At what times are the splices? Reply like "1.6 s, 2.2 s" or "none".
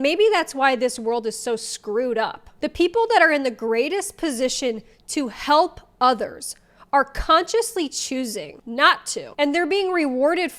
none